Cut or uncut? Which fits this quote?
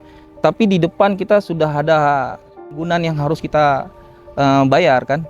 cut